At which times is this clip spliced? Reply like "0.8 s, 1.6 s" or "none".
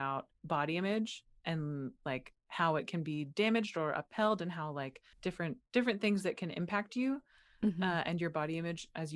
none